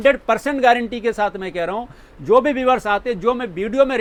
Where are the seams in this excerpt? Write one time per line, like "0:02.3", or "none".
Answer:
none